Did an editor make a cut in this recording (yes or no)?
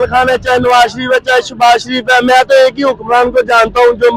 no